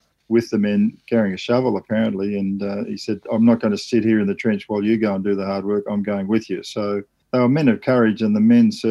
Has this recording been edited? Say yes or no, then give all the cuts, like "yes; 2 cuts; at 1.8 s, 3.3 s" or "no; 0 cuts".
yes; 1 cut; at 7.1 s